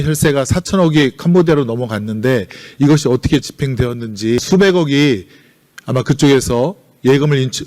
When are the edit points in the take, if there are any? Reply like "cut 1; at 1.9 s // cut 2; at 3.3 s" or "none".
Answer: cut 1; at 4.4 s